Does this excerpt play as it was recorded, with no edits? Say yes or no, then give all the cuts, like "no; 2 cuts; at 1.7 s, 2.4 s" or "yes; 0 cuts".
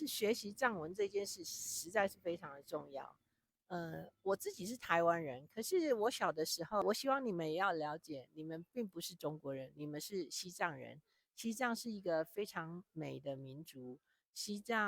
no; 1 cut; at 6.8 s